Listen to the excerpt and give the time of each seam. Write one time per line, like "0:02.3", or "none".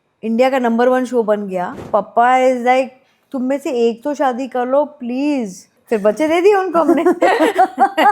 0:01.8
0:05.7

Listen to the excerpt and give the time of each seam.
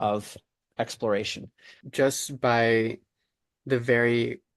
0:01.8

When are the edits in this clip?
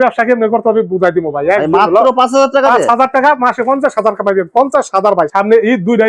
none

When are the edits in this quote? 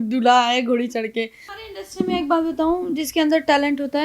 0:01.4

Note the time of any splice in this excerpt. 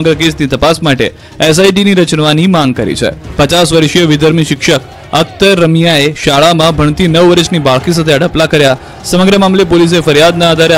none

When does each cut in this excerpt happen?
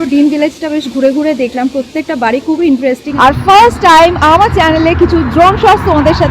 0:03.1

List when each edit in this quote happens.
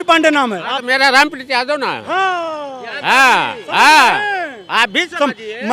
none

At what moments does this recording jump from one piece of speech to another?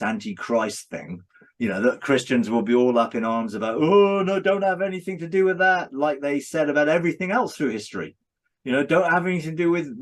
none

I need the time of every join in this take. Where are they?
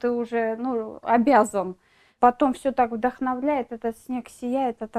0:02.1

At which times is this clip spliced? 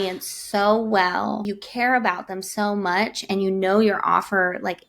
0:01.5

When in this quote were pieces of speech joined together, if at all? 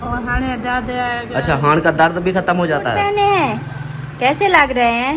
0:03.0

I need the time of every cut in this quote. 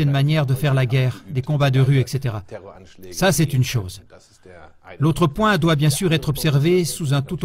none

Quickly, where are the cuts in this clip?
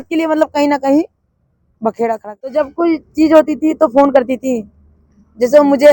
0:02.5

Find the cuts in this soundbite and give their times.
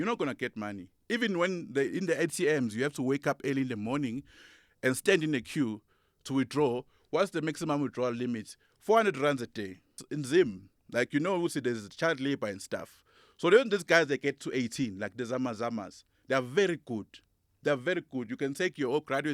0:10.1

